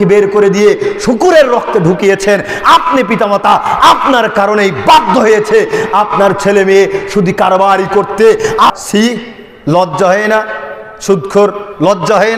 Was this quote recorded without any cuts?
no; 1 cut; at 8.7 s

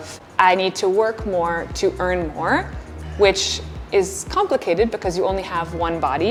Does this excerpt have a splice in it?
no; 0 cuts

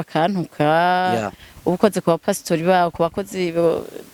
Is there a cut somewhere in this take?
no; 0 cuts

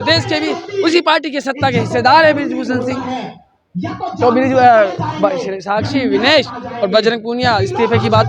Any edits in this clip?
no; 0 cuts

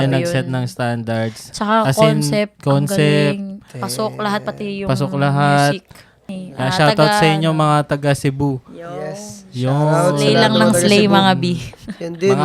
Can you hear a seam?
yes; 1 cut; at 6.3 s

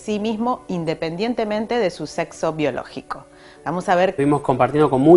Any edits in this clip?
no; 0 cuts

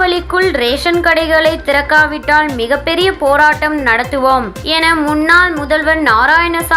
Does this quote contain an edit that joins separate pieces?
no; 0 cuts

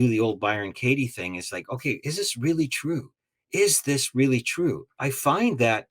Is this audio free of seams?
no; 1 cut; at 4.9 s

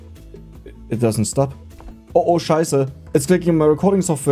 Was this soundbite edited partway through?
yes; 1 cut; at 1.7 s

